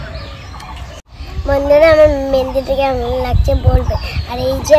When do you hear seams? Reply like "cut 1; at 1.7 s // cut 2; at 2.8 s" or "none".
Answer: cut 1; at 1.0 s